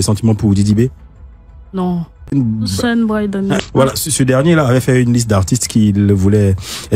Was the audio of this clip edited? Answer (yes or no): yes